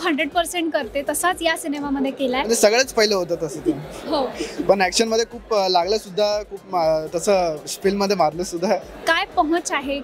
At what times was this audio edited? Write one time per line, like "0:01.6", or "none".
0:02.5
0:08.9